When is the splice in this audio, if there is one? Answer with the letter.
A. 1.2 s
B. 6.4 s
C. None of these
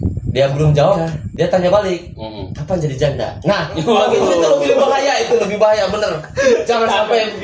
C